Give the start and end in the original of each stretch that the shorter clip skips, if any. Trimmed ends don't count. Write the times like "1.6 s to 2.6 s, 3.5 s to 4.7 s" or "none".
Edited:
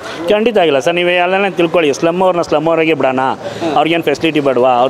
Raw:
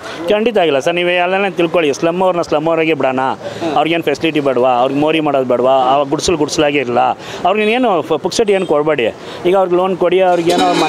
none